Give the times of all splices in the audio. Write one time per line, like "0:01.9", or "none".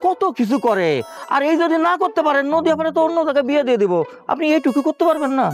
none